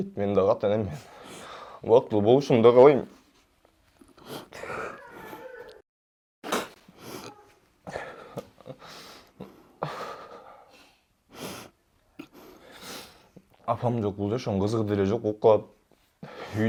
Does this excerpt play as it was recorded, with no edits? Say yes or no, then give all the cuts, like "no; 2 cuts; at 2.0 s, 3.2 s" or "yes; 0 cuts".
yes; 0 cuts